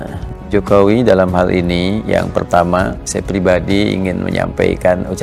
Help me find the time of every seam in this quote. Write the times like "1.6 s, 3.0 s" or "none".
none